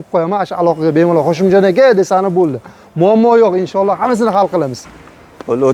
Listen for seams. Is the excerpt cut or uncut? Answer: uncut